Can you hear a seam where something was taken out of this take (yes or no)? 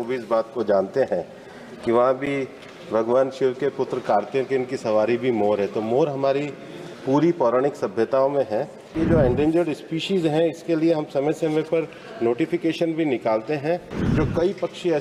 yes